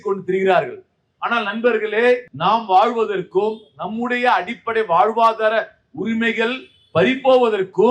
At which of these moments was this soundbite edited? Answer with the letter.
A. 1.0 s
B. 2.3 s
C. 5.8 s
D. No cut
B